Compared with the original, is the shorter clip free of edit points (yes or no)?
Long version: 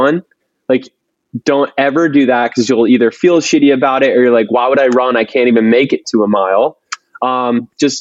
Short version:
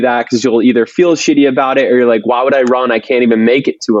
yes